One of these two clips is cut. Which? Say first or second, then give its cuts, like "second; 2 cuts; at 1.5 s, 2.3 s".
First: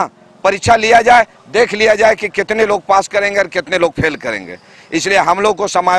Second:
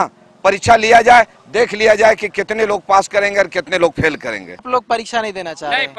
second; 1 cut; at 4.7 s